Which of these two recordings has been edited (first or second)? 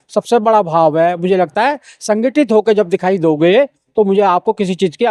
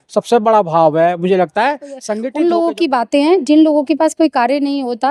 second